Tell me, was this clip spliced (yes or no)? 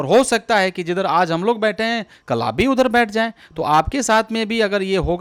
no